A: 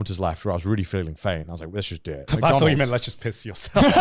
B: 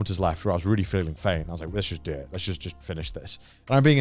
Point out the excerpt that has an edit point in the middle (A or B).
A